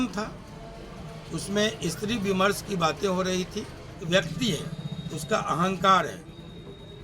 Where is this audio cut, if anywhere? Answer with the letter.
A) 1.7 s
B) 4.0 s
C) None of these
B